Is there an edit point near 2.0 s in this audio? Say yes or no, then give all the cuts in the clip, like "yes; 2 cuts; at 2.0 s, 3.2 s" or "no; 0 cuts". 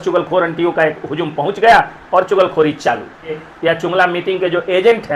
no; 1 cut; at 3.5 s